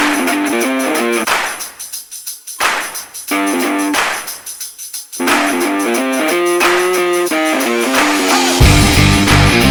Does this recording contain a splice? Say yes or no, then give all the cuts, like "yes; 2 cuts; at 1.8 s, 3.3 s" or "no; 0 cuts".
no; 0 cuts